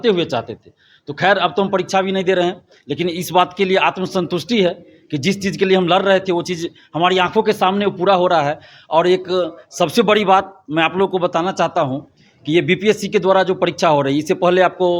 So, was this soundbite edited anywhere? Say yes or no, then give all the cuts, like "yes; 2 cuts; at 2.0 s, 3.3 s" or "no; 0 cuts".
no; 0 cuts